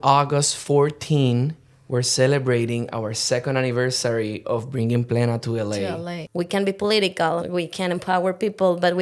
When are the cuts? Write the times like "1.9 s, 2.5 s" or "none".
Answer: 6.1 s, 7.4 s